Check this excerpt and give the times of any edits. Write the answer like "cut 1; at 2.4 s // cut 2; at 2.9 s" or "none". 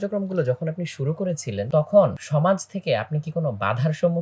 cut 1; at 1.7 s // cut 2; at 2.2 s